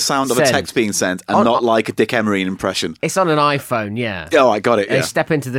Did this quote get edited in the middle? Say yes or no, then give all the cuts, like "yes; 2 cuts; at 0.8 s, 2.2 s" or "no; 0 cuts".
no; 0 cuts